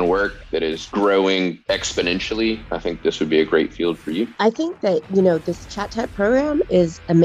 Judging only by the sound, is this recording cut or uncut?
cut